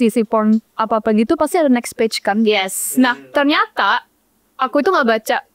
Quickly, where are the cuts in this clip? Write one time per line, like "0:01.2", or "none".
none